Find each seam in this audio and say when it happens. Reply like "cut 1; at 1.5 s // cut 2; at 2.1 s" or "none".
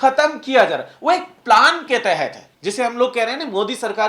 cut 1; at 2.5 s